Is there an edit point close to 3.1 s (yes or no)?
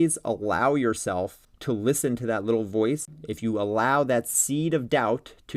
yes